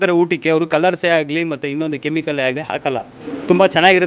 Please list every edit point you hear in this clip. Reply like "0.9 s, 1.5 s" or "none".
none